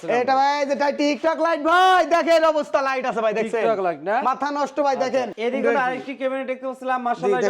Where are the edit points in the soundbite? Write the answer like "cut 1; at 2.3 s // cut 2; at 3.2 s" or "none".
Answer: cut 1; at 5.3 s